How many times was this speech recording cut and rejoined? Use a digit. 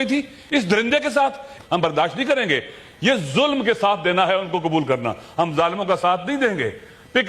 1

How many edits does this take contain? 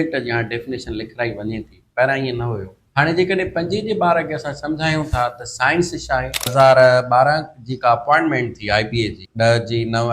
3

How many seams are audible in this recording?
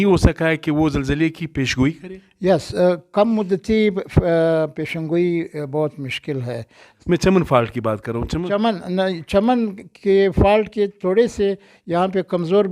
1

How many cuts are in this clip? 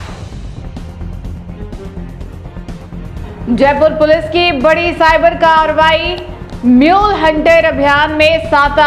0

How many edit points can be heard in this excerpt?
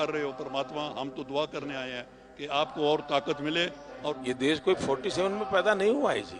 1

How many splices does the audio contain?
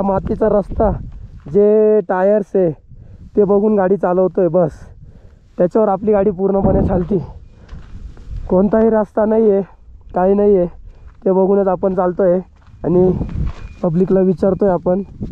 0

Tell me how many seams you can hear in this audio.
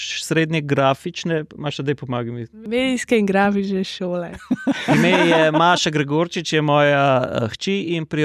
1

